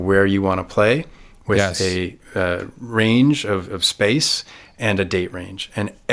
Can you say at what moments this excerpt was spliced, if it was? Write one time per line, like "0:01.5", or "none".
none